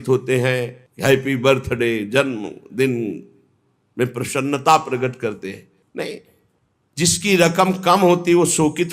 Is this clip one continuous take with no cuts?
yes; 0 cuts

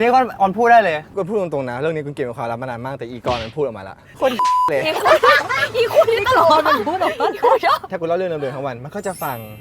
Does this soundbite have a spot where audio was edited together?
yes; 3 cuts; at 1.1 s, 4.1 s, 7.9 s

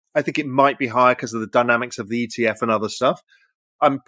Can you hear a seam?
no; 0 cuts

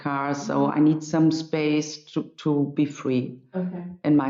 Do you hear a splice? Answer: no; 0 cuts

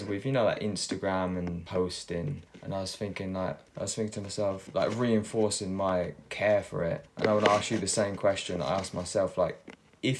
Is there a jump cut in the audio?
yes; 5 cuts; at 1.6 s, 2.5 s, 3.7 s, 4.6 s, 7.1 s

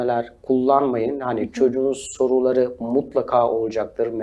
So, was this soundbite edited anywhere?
no; 0 cuts

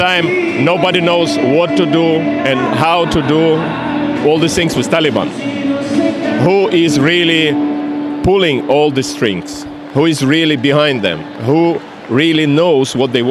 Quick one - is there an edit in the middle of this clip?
no; 0 cuts

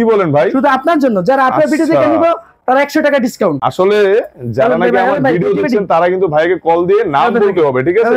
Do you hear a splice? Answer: no; 0 cuts

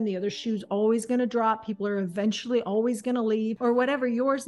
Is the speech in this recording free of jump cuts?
no; 1 cut; at 3.5 s

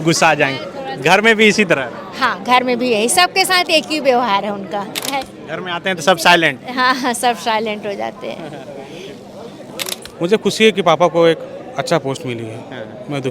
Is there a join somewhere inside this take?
yes; 2 cuts; at 5.0 s, 10.0 s

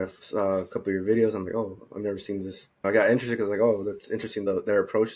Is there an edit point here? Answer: yes; 2 cuts; at 2.8 s, 4.4 s

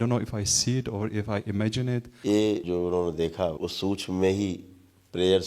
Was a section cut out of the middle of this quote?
yes; 3 cuts; at 2.1 s, 2.6 s, 3.6 s

